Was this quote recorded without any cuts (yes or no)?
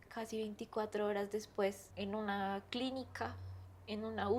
yes